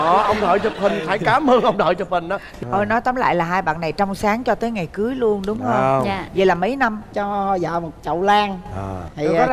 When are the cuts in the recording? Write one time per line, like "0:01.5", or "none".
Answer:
0:07.1